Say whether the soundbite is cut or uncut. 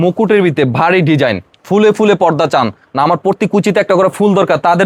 uncut